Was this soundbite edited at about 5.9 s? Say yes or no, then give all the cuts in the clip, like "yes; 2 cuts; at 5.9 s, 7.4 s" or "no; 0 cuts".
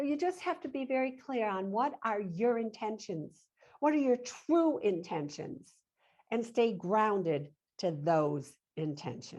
no; 0 cuts